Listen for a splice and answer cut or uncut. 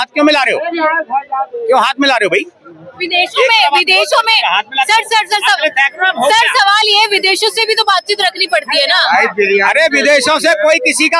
uncut